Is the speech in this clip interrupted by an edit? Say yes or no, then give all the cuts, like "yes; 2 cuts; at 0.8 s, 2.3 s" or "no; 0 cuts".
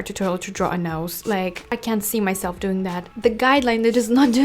yes; 1 cut; at 3.0 s